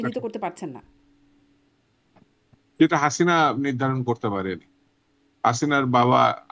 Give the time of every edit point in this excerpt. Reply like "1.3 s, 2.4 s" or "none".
none